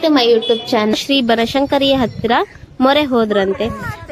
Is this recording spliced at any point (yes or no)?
yes